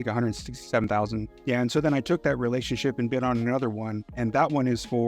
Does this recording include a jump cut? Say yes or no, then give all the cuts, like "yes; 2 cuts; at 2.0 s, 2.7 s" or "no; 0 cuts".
yes; 2 cuts; at 0.8 s, 4.0 s